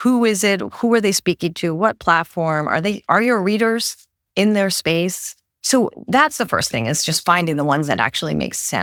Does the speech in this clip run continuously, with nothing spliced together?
yes; 0 cuts

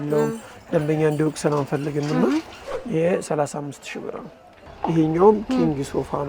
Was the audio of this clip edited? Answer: yes; 1 cut; at 2.8 s

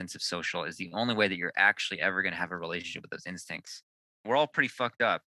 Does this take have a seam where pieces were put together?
yes; 1 cut; at 4.2 s

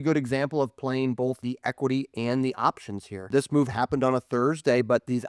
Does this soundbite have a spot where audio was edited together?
yes; 2 cuts; at 1.4 s, 3.3 s

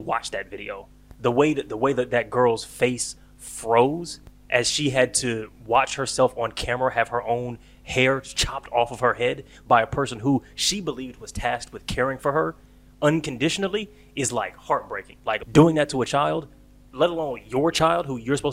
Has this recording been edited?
yes; 1 cut; at 15.4 s

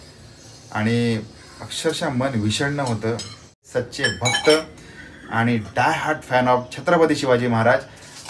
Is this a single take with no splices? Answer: no; 1 cut; at 3.7 s

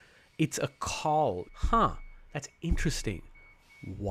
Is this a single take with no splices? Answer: yes; 0 cuts

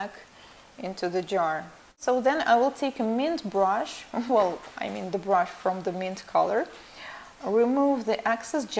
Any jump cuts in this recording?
no; 0 cuts

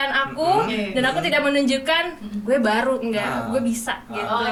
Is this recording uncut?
yes; 0 cuts

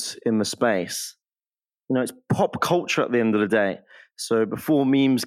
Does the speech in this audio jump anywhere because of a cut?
yes; 1 cut; at 1.5 s

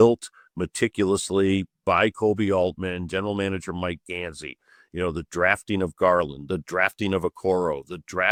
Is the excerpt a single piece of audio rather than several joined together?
yes; 0 cuts

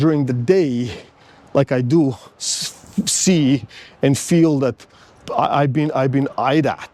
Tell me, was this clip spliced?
no; 0 cuts

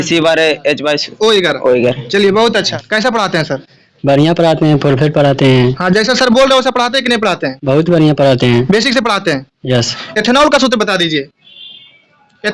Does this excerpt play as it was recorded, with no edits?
no; 2 cuts; at 2.7 s, 10.0 s

